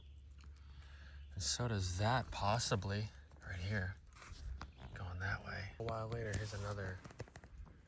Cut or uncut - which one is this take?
cut